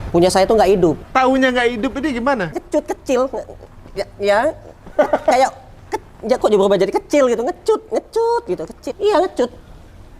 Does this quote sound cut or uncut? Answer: cut